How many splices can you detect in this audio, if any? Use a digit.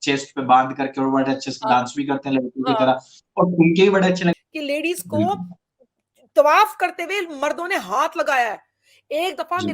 1